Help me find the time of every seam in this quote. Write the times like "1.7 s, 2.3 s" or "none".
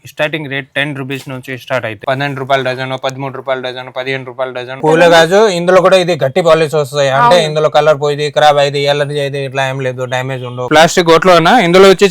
2.0 s, 4.8 s, 10.7 s